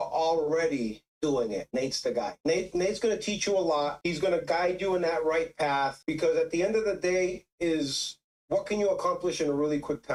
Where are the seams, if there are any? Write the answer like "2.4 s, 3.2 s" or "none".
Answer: none

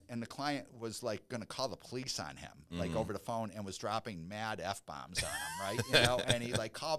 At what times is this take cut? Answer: none

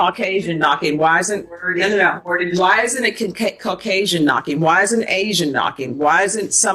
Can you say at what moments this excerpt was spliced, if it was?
none

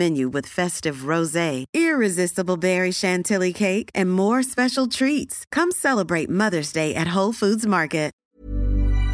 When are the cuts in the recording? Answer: 8.2 s

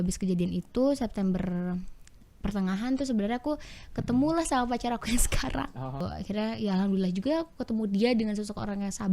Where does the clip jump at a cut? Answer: 6.1 s

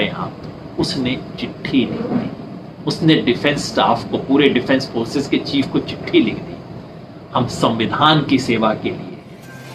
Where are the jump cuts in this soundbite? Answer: none

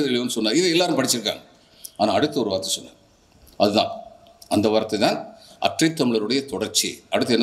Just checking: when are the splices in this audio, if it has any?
none

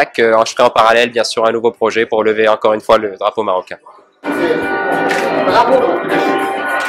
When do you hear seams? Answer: none

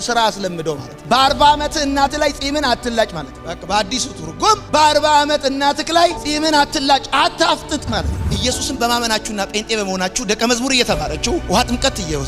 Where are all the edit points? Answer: 8.2 s

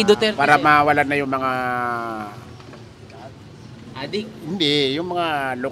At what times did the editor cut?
none

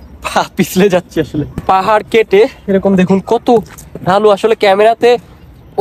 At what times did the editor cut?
1.6 s

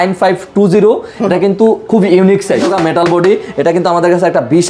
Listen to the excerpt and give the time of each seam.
2.7 s

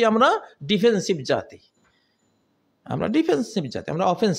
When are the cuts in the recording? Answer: none

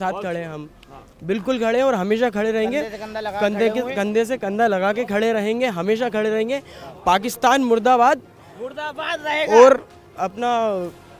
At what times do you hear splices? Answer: none

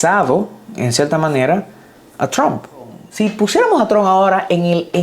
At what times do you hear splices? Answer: 3.0 s

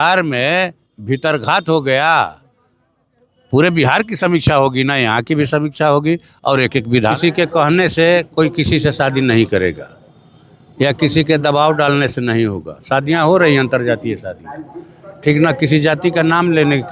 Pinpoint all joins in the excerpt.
7.2 s

